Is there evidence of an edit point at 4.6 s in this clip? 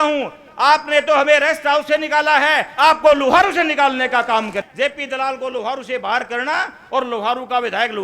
yes; 1 cut; at 4.6 s

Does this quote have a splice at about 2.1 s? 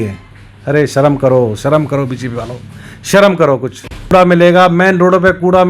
no; 1 cut; at 4.1 s

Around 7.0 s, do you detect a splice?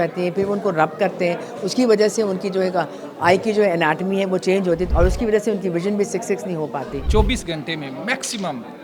yes; 2 cuts; at 4.8 s, 7.0 s

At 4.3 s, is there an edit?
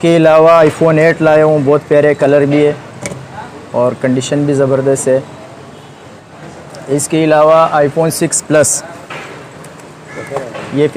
no; 1 cut; at 6.4 s

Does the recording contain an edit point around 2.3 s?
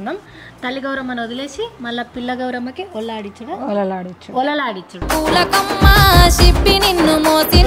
no; 1 cut; at 5.1 s

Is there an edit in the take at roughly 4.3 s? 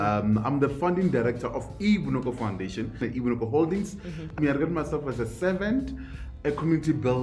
yes; 3 cuts; at 3.0 s, 4.3 s, 6.3 s

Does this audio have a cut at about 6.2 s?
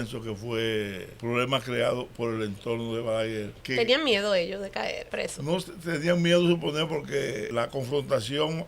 no; 4 cuts; at 1.1 s, 3.6 s, 5.0 s, 7.5 s

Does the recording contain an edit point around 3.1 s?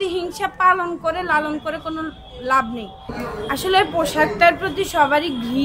yes; 1 cut; at 3.1 s

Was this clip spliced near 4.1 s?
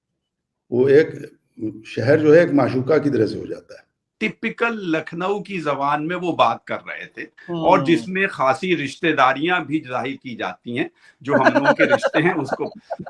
yes; 1 cut; at 4.1 s

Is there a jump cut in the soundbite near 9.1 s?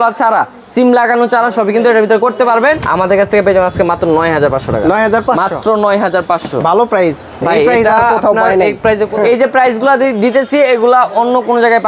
yes; 2 cuts; at 2.8 s, 9.1 s

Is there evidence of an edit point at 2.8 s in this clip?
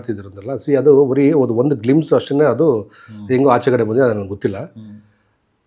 no; 0 cuts

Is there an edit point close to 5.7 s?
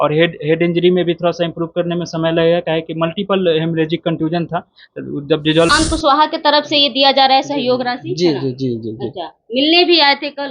yes; 1 cut; at 5.7 s

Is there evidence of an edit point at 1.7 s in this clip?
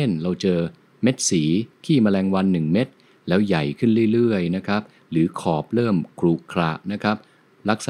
yes; 1 cut; at 1.7 s

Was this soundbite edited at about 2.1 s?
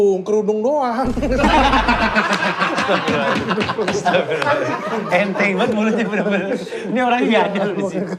no; 0 cuts

